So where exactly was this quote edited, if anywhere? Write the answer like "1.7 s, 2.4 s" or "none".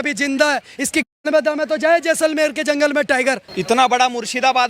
3.5 s